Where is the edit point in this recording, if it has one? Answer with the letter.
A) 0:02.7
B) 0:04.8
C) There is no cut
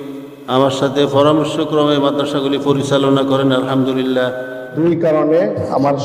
B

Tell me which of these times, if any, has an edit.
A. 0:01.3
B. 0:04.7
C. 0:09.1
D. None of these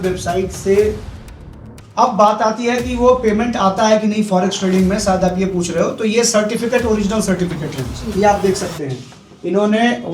A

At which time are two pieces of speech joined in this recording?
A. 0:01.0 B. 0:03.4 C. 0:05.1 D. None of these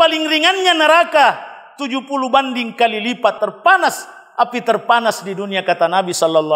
B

